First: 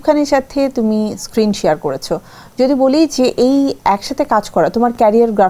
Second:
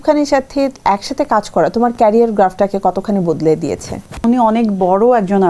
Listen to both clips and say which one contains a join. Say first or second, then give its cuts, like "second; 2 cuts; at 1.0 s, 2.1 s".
second; 2 cuts; at 0.8 s, 4.2 s